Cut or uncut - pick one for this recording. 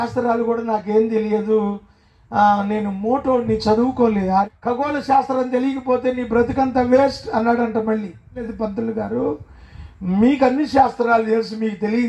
cut